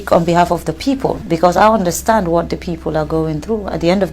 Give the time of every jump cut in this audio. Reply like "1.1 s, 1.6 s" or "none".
1.2 s